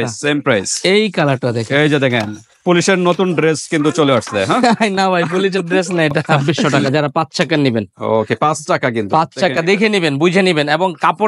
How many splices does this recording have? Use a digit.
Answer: 1